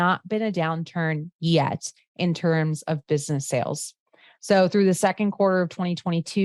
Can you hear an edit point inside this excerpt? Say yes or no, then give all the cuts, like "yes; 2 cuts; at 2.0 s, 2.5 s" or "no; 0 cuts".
no; 0 cuts